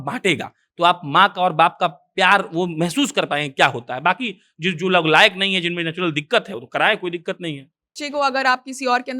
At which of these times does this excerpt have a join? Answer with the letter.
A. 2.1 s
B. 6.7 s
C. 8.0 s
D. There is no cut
C